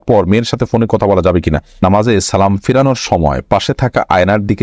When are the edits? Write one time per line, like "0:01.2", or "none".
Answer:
0:01.8